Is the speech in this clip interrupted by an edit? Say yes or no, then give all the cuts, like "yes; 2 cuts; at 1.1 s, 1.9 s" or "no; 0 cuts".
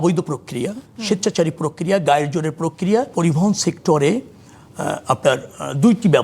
yes; 1 cut; at 3.1 s